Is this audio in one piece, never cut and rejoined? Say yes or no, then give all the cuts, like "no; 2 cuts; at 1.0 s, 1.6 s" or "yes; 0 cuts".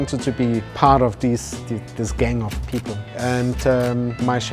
yes; 0 cuts